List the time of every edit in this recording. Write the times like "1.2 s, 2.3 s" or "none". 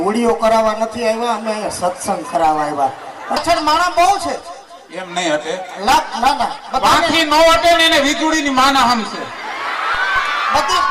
3.4 s